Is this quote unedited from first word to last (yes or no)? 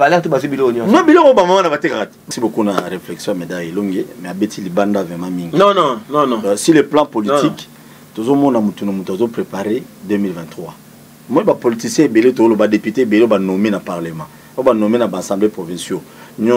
no